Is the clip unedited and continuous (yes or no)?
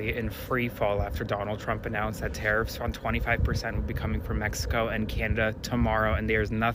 yes